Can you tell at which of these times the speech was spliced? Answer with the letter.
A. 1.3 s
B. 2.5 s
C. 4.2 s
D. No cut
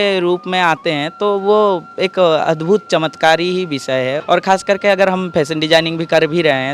C